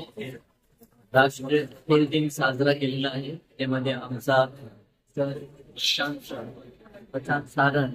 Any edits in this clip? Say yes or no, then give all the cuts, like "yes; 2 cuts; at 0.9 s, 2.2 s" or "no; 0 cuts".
no; 0 cuts